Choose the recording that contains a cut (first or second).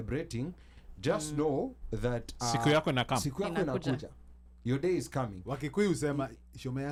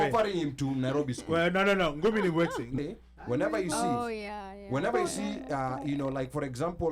second